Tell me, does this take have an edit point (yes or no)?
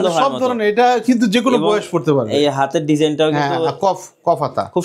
no